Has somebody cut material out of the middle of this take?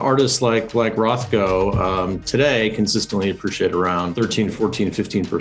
yes; 1 cut; at 4.3 s

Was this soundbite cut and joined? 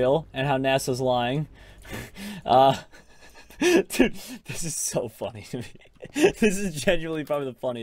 no; 0 cuts

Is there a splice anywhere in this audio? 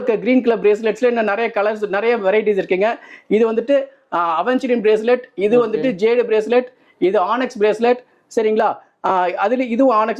no; 0 cuts

